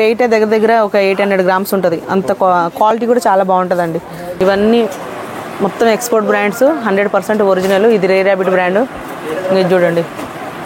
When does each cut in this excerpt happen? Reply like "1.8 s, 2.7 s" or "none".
4.2 s